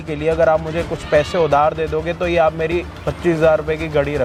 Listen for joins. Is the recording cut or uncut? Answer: uncut